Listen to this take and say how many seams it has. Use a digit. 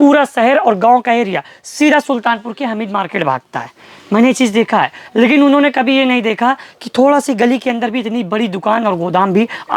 0